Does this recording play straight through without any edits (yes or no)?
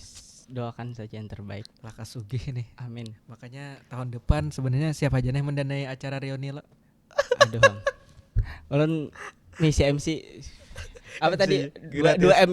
yes